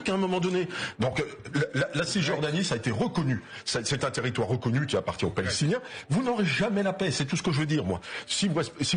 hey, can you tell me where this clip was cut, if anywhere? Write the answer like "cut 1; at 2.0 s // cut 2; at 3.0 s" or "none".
none